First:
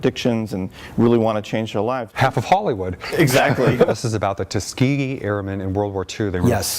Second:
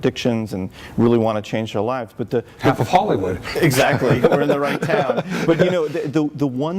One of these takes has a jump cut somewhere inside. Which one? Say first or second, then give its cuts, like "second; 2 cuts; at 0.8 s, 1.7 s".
first; 2 cuts; at 2.2 s, 3.9 s